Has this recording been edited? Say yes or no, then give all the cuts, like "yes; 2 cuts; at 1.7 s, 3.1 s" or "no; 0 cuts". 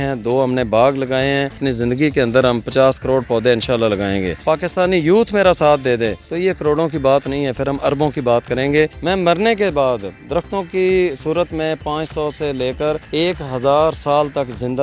yes; 5 cuts; at 1.6 s, 4.4 s, 6.2 s, 9.0 s, 13.0 s